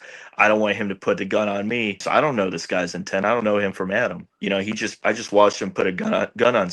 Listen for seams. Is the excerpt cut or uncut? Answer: cut